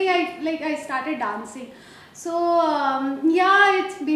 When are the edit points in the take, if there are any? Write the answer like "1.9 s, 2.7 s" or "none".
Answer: none